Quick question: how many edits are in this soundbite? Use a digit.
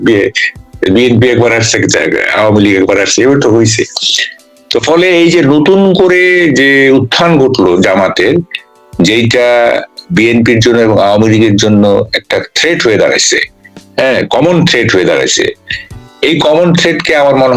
0